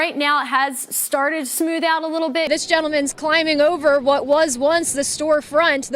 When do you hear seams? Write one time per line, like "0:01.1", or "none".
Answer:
0:02.5